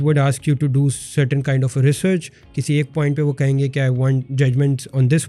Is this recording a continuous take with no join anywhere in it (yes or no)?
yes